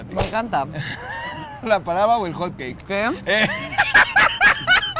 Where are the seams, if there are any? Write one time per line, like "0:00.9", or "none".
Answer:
0:03.6